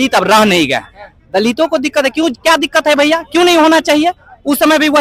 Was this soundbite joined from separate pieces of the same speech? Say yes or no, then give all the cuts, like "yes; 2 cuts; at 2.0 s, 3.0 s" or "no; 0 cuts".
no; 0 cuts